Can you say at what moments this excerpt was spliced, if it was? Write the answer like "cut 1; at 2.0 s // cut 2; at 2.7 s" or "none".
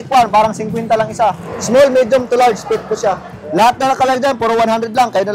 cut 1; at 1.5 s // cut 2; at 3.3 s

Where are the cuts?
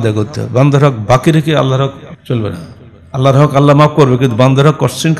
cut 1; at 2.1 s

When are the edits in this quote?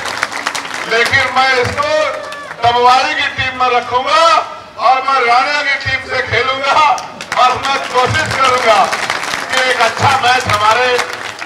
none

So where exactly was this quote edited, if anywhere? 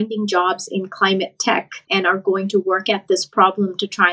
cut 1; at 1.8 s

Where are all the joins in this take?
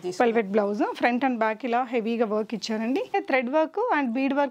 cut 1; at 3.1 s

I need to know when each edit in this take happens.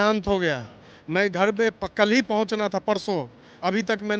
none

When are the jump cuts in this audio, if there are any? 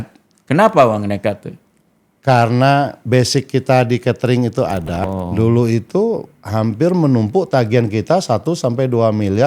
cut 1; at 5.1 s

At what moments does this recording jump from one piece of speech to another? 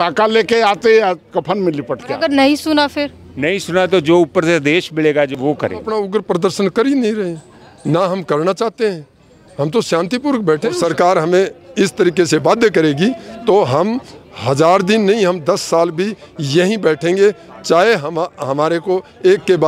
cut 1; at 2.1 s // cut 2; at 5.7 s // cut 3; at 10.8 s

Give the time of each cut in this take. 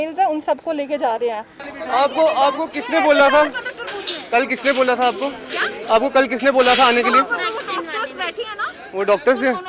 cut 1; at 1.6 s

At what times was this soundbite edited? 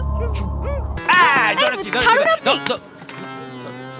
cut 1; at 0.9 s

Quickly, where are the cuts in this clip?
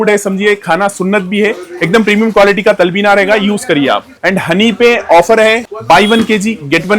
none

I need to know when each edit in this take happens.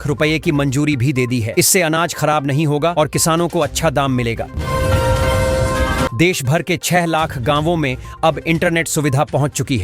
cut 1; at 4.5 s // cut 2; at 6.1 s

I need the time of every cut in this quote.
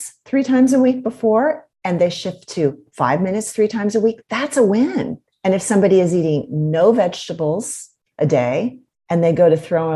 cut 1; at 1.7 s // cut 2; at 5.2 s // cut 3; at 8.9 s

